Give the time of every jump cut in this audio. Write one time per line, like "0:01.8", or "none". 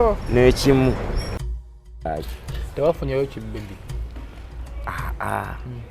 0:01.8